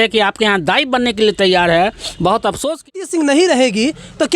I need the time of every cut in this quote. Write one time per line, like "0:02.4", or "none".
0:02.9